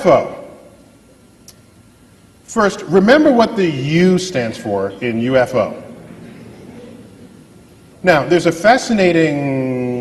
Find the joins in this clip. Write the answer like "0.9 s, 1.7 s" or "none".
2.3 s